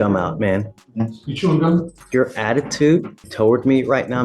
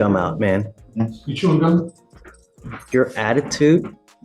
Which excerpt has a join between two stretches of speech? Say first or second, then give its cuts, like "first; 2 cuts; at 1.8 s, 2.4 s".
first; 2 cuts; at 2.0 s, 3.2 s